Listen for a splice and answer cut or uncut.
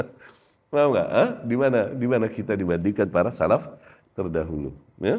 uncut